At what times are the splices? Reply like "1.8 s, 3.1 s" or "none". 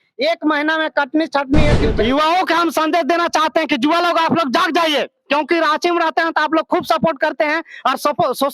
1.8 s